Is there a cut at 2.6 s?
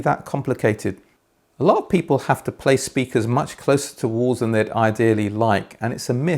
no; 1 cut; at 1.1 s

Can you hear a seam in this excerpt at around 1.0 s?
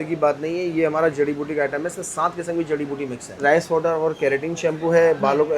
no; 1 cut; at 3.4 s

